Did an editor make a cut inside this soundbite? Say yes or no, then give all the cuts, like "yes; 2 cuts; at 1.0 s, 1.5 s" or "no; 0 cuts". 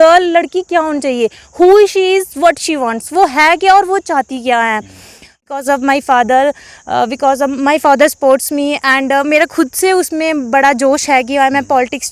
yes; 1 cut; at 5.3 s